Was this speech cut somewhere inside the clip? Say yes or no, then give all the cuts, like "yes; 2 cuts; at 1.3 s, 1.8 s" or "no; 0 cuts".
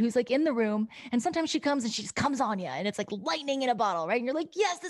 no; 0 cuts